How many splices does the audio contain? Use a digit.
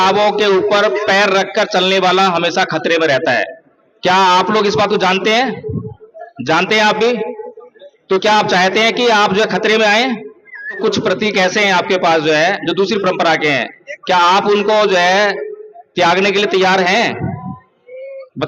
1